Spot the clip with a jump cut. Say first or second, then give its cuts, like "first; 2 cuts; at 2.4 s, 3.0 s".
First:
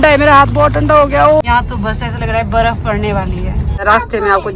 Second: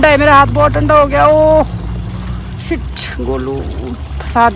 first; 2 cuts; at 1.4 s, 3.8 s